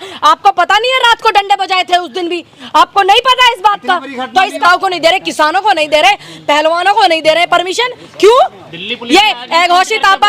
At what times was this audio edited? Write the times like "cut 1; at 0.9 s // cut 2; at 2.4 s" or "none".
cut 1; at 4.6 s

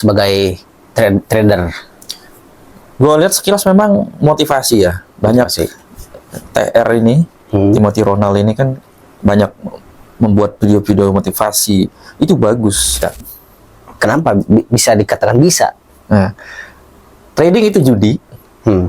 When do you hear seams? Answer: cut 1; at 13.0 s

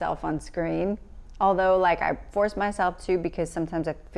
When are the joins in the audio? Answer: none

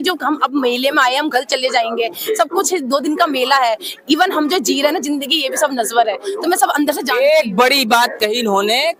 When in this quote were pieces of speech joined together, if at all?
none

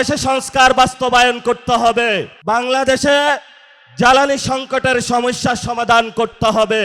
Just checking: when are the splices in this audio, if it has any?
cut 1; at 2.3 s

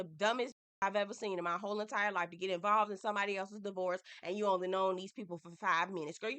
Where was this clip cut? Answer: none

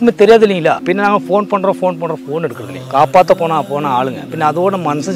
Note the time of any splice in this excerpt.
cut 1; at 0.8 s // cut 2; at 2.7 s // cut 3; at 4.2 s

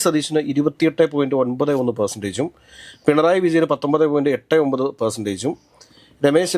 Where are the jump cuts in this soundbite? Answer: none

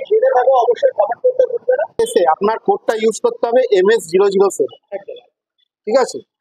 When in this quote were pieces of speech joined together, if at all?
cut 1; at 2.0 s

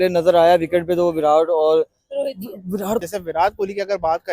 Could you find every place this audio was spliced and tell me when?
cut 1; at 3.0 s

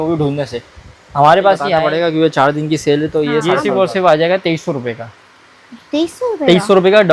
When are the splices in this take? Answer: cut 1; at 1.8 s // cut 2; at 3.6 s

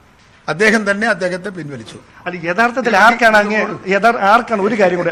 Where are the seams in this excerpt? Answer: none

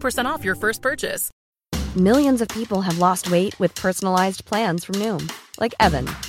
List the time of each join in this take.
cut 1; at 1.3 s

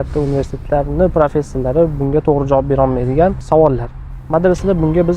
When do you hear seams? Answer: cut 1; at 3.4 s

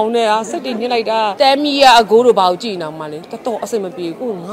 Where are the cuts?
cut 1; at 1.3 s

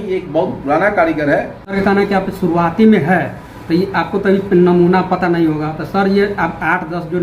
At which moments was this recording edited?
cut 1; at 1.6 s

